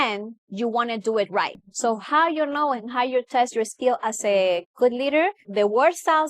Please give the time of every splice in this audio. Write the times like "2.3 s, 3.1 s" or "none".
1.6 s, 5.4 s